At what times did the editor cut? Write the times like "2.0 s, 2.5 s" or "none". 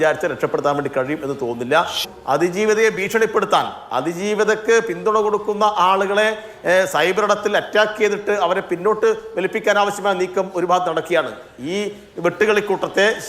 2.0 s